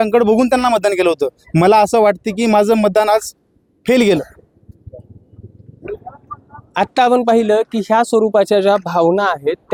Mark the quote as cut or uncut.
uncut